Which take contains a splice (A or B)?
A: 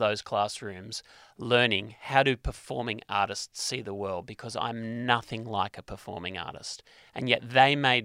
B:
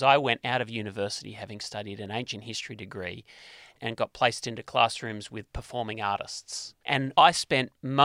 B